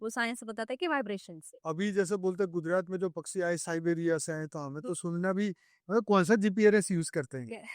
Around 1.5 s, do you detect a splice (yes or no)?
yes